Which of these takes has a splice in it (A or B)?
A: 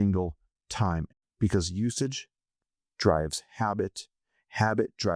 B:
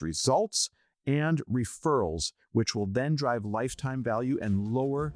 A